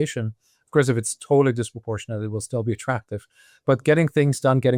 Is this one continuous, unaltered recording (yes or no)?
yes